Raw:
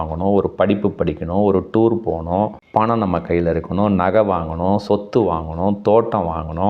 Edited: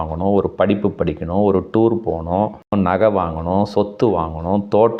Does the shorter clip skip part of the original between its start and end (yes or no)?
yes